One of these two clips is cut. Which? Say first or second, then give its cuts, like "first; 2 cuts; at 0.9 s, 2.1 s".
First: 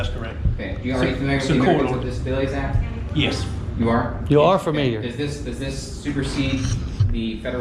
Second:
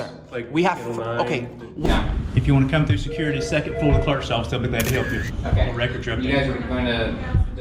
second; 1 cut; at 1.9 s